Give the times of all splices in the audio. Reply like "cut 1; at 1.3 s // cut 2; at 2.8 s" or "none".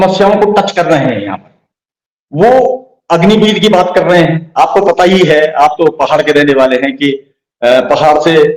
none